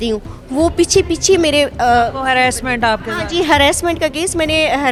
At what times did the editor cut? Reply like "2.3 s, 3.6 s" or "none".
none